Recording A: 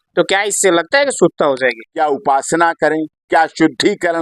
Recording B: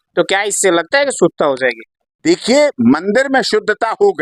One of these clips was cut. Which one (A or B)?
A